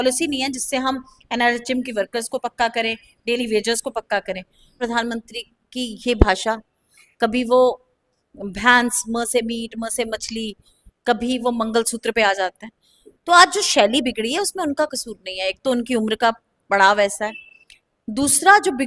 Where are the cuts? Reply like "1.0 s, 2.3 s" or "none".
4.8 s